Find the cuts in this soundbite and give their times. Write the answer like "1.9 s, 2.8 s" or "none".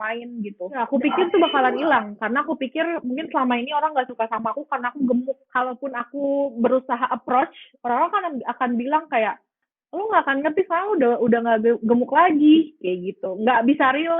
0.8 s, 5.4 s